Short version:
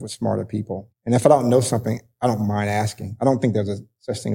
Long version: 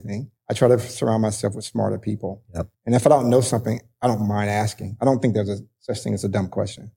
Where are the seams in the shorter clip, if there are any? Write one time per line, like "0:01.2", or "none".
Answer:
0:00.9